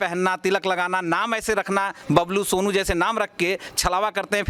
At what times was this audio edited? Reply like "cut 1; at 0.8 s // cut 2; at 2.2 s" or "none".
none